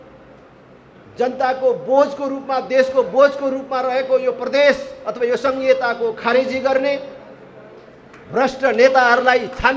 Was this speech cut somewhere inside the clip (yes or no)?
no